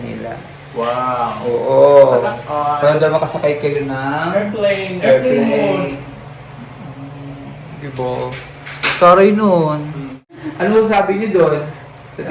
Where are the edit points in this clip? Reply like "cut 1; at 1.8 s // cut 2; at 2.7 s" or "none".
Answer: cut 1; at 10.2 s